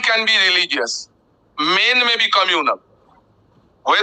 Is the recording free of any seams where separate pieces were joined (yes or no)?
yes